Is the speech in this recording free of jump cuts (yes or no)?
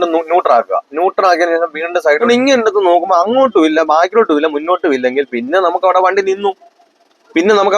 no